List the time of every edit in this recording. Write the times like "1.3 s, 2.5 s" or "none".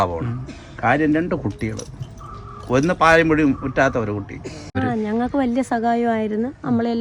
4.7 s